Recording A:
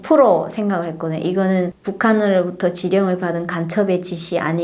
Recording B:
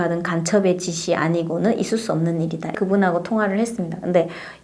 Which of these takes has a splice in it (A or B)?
B